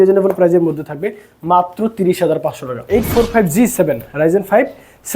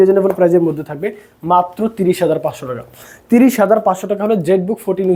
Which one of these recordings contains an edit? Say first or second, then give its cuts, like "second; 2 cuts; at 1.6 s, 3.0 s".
first; 1 cut; at 2.8 s